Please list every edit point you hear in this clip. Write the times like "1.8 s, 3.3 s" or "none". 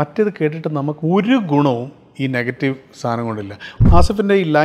1.0 s, 3.7 s

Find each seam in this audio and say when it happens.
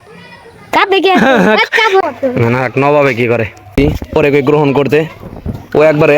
2.1 s, 3.8 s

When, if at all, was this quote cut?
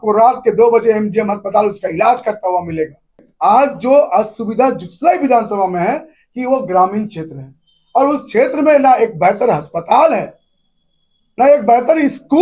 3.2 s

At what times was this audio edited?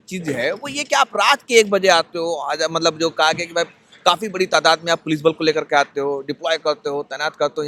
none

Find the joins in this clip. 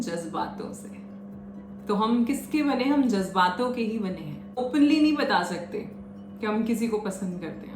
4.6 s

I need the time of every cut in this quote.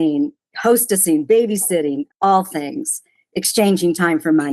2.1 s

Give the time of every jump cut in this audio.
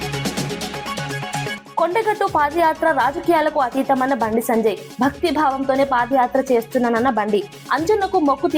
1.6 s

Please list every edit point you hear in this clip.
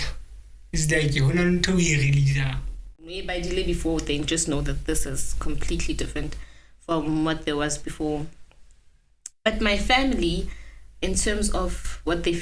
3.2 s

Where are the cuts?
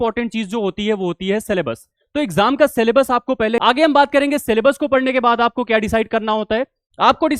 3.6 s

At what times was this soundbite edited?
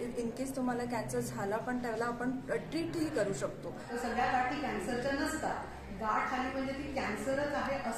3.9 s

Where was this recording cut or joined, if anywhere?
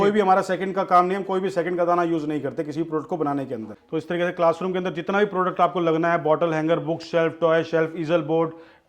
3.8 s

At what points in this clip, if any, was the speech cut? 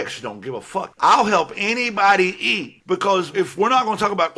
0.9 s, 3.3 s

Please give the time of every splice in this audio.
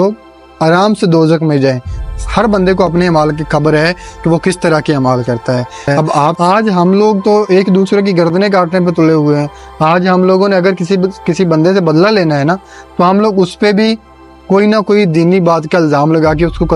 6.4 s

